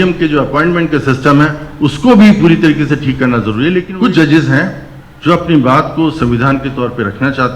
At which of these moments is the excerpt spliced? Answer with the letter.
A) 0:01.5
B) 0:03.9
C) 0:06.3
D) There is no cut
B